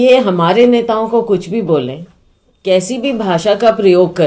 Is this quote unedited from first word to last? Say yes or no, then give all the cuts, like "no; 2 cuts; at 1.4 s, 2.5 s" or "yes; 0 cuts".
yes; 0 cuts